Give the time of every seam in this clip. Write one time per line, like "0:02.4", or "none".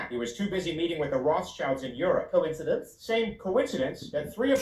0:03.7